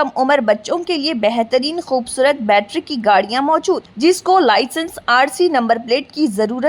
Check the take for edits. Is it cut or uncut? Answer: uncut